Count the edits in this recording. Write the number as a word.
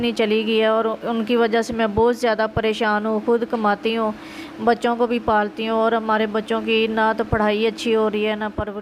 zero